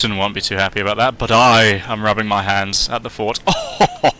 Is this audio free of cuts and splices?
yes; 0 cuts

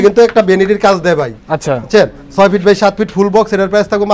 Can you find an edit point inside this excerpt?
no; 0 cuts

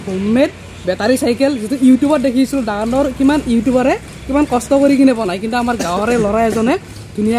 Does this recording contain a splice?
no; 0 cuts

